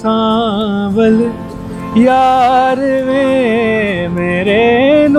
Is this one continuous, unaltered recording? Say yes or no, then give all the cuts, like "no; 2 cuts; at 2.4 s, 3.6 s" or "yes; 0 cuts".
yes; 0 cuts